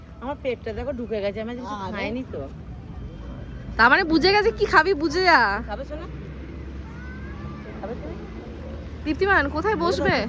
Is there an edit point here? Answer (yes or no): no